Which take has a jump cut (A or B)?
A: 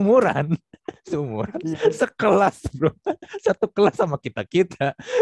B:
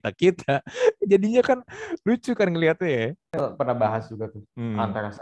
B